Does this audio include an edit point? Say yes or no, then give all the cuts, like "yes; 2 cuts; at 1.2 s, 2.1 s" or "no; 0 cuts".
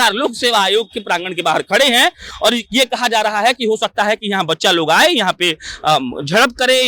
no; 0 cuts